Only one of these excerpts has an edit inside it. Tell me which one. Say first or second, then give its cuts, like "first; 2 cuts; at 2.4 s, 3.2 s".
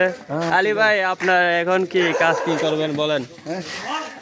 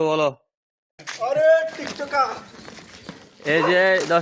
second; 1 cut; at 1.1 s